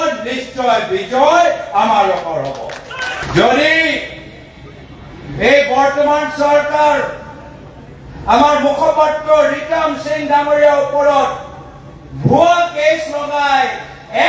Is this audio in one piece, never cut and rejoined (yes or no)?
no